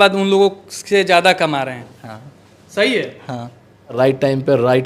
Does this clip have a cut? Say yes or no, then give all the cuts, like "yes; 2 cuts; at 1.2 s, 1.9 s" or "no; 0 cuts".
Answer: yes; 1 cut; at 4.0 s